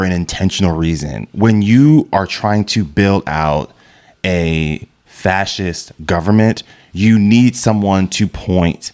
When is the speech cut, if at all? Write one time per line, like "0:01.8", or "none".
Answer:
none